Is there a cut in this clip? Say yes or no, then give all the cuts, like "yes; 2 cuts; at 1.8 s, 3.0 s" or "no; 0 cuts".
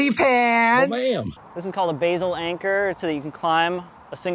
yes; 2 cuts; at 1.3 s, 3.0 s